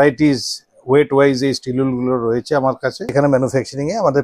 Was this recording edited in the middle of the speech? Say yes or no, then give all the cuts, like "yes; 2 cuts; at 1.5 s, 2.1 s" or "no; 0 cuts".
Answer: yes; 1 cut; at 3.1 s